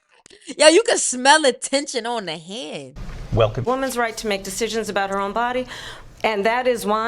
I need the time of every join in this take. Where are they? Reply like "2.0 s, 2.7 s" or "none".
3.6 s